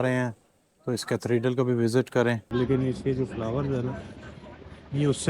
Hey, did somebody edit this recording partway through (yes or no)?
yes